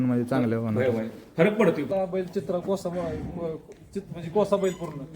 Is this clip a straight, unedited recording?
no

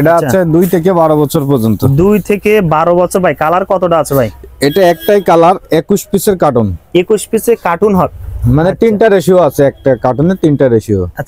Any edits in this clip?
no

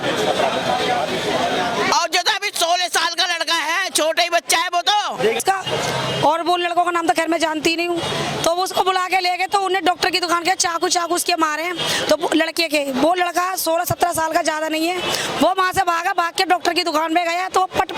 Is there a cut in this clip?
yes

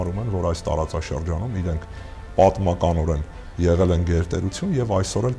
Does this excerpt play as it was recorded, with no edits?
yes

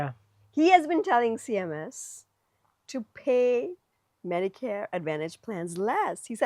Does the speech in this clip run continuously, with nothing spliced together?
yes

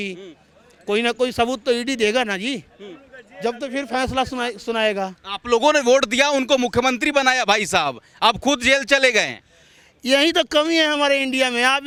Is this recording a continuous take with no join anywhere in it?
yes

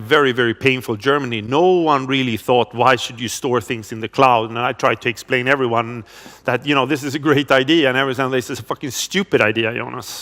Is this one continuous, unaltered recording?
yes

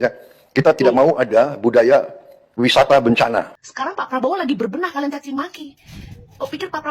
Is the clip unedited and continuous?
no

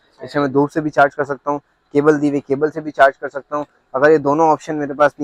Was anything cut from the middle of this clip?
no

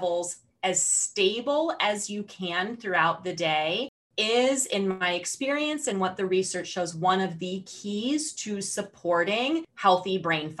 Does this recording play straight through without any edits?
no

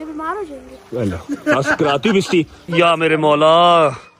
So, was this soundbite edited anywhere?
yes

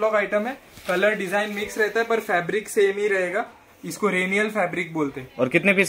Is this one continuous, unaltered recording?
yes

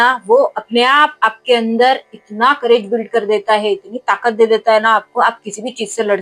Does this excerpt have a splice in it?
no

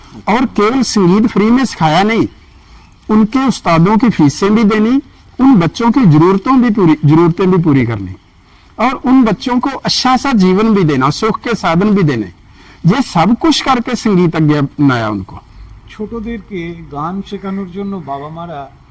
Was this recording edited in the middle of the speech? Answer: yes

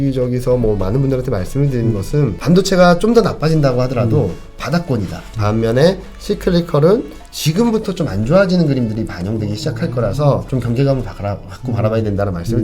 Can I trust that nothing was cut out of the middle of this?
no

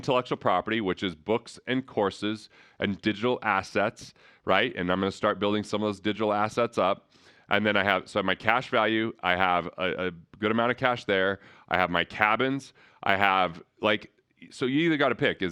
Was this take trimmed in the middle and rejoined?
no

